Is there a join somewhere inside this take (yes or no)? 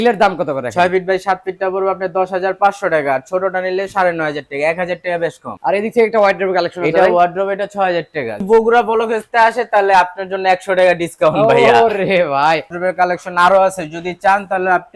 yes